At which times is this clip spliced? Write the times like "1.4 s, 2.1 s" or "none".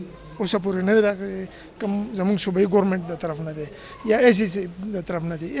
none